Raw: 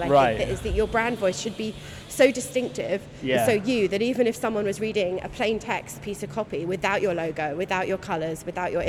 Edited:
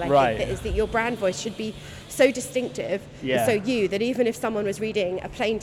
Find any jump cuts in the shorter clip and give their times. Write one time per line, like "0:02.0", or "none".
none